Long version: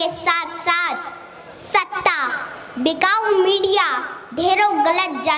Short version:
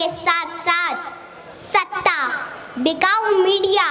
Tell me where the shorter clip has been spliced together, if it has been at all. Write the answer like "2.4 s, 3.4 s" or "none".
none